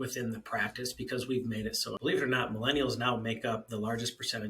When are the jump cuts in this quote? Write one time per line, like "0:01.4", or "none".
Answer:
0:01.9